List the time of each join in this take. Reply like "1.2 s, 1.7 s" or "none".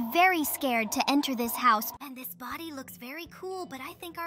1.9 s